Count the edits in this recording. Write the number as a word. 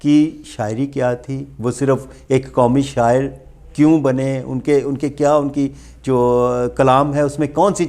zero